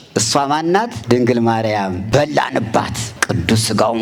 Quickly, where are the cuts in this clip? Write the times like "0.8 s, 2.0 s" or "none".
1.0 s, 2.0 s, 3.1 s